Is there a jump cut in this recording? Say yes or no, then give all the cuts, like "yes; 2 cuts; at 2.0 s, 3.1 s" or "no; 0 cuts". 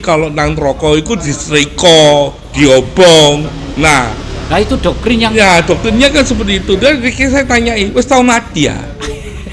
no; 0 cuts